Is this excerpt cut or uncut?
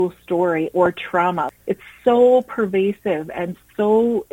cut